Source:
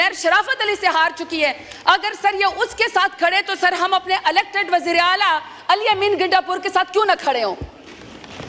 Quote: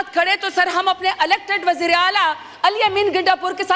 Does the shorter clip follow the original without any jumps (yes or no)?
yes